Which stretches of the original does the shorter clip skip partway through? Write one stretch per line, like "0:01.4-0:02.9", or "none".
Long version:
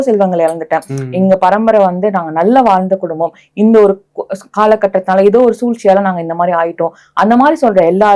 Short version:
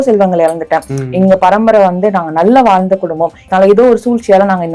0:03.4-0:05.0